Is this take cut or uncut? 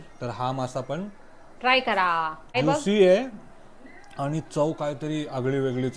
cut